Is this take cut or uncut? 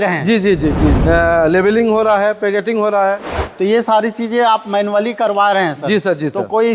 cut